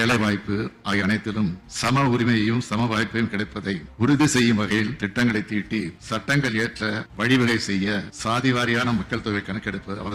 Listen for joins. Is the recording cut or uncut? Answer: uncut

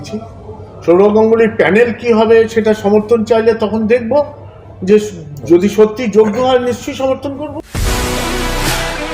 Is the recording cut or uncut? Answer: cut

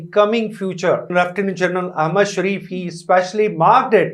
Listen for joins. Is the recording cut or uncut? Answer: cut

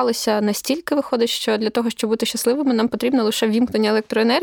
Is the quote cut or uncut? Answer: uncut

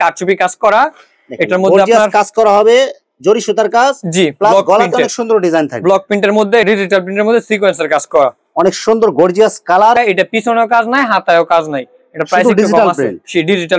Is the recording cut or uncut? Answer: cut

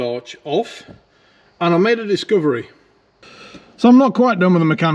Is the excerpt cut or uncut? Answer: cut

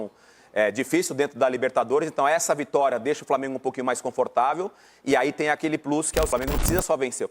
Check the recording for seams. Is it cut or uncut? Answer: cut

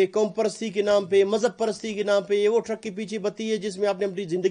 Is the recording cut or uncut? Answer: uncut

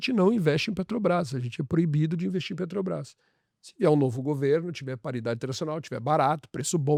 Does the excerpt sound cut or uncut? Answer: uncut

